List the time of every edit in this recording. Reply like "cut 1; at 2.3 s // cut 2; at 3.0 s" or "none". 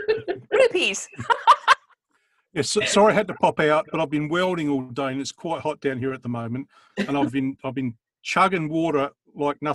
none